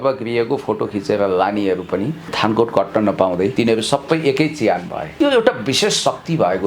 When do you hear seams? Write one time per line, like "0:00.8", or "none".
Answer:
0:02.2
0:03.5
0:05.0